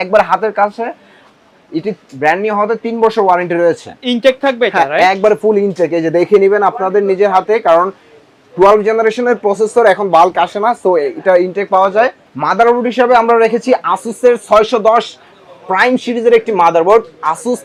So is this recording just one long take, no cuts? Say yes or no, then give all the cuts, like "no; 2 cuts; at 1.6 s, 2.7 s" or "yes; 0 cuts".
yes; 0 cuts